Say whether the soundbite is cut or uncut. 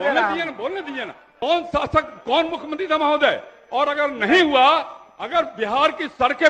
cut